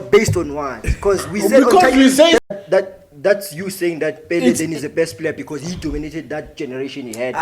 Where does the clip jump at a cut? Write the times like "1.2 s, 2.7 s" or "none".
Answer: 2.5 s